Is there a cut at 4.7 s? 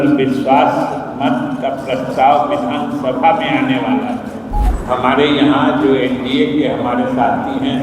yes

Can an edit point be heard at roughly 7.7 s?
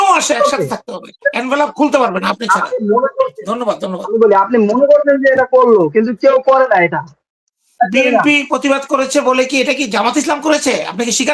yes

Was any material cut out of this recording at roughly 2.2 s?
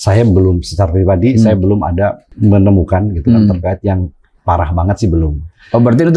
yes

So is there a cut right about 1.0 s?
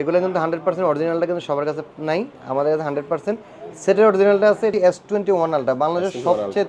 no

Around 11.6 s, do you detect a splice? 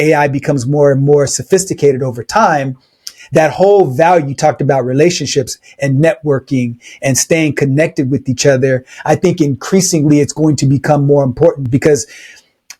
no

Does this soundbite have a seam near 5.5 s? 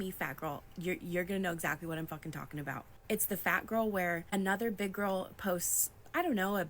no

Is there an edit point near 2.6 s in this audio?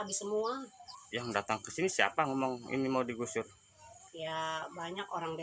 no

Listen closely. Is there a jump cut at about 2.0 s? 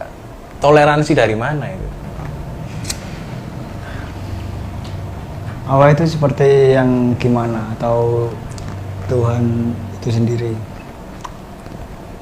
yes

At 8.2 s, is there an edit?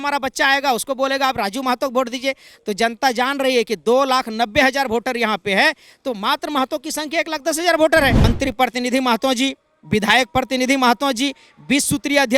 yes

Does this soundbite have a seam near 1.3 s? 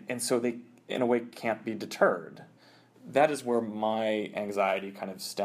no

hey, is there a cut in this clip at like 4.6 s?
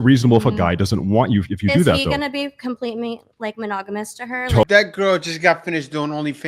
yes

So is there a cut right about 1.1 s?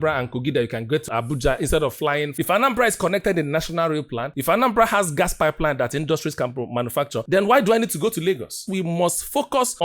yes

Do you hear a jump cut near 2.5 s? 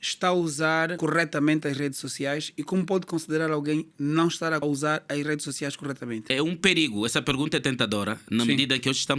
no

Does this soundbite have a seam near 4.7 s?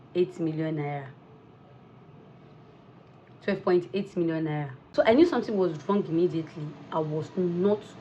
yes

